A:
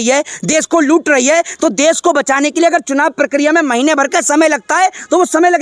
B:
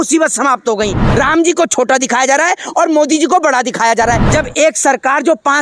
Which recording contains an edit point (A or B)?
B